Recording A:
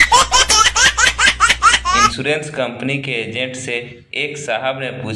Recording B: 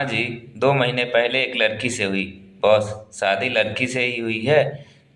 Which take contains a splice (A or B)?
A